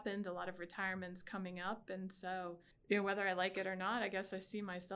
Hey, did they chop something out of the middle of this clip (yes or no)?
no